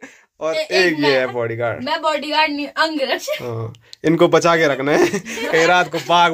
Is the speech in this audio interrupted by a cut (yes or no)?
no